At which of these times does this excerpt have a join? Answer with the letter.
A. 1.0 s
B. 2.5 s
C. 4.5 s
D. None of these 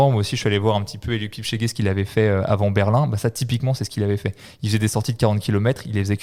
D